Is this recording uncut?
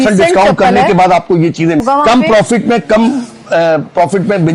no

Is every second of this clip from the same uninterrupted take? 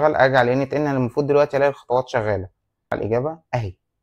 no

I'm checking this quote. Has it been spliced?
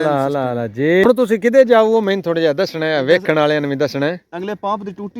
yes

